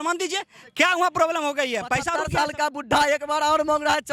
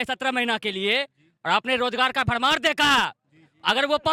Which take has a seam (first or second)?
first